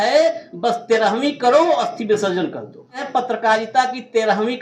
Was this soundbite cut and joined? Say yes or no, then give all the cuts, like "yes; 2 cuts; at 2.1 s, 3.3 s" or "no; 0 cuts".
yes; 1 cut; at 3.1 s